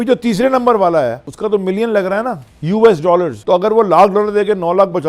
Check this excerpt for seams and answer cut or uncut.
cut